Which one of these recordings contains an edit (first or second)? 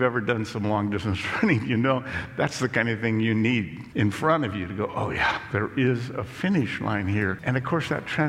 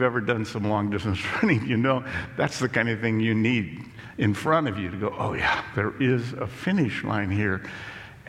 first